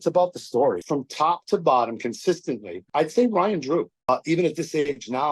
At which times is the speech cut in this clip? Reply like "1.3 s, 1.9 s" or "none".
0.8 s, 2.7 s, 4.1 s